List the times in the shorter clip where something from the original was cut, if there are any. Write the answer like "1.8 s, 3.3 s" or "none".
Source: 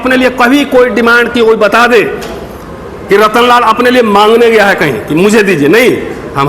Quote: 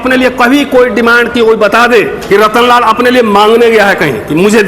2.2 s